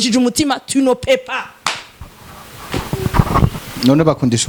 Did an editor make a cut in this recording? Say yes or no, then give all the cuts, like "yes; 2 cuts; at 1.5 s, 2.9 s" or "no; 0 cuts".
no; 0 cuts